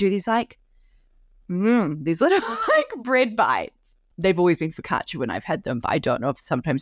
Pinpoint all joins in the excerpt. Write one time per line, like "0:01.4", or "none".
0:04.0